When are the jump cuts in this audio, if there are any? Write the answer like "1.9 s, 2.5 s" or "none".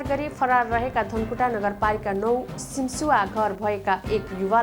none